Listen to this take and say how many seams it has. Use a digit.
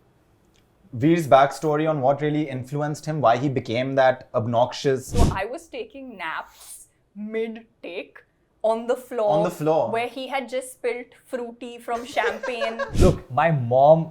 2